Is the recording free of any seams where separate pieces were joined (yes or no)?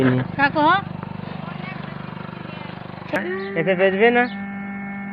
no